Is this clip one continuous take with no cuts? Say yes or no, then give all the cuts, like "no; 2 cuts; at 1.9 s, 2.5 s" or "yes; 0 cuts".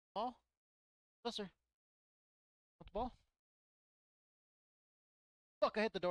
yes; 0 cuts